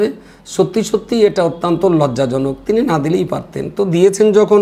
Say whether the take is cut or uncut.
uncut